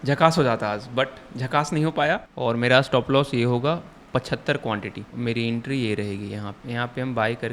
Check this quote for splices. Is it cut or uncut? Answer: cut